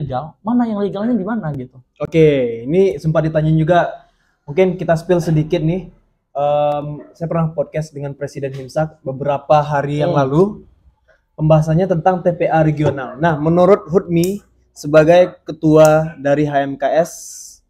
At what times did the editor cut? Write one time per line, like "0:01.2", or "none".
none